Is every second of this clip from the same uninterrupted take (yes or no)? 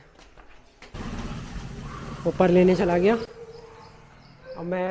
no